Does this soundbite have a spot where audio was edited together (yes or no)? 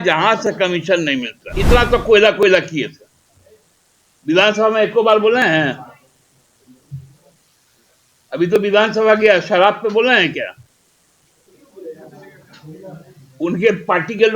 yes